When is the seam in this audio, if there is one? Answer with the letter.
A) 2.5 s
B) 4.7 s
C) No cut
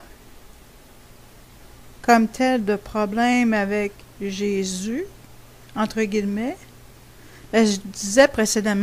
B